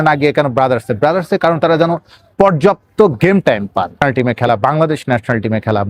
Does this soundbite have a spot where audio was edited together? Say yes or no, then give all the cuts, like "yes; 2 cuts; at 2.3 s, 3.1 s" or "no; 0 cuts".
yes; 1 cut; at 4.0 s